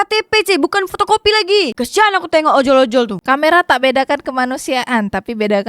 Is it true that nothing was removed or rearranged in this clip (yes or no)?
no